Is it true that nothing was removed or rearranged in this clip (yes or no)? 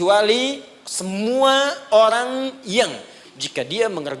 no